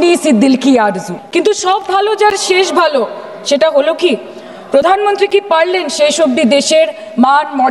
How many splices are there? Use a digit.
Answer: 1